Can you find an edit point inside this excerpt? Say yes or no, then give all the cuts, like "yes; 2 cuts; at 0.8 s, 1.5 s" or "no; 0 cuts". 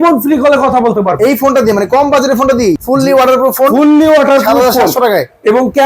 yes; 1 cut; at 2.8 s